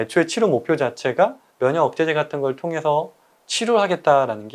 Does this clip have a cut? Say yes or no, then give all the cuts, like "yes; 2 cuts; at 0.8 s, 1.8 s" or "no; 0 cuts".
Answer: yes; 1 cut; at 1.4 s